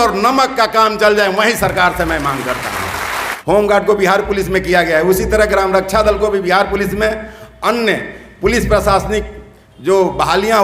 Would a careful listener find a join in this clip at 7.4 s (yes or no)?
no